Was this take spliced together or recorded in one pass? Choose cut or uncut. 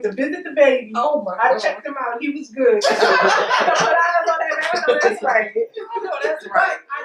uncut